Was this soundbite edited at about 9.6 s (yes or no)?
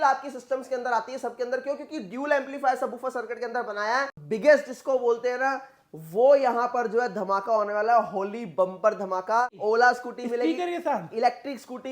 yes